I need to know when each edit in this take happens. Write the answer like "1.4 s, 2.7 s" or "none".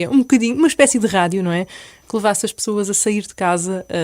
1.9 s